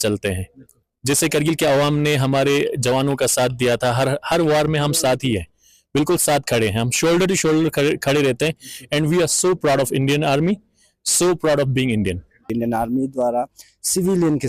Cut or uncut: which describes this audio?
cut